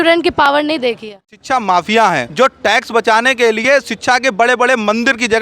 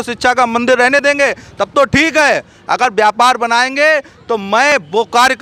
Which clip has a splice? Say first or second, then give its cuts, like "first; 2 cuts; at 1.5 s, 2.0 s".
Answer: first; 2 cuts; at 1.3 s, 2.3 s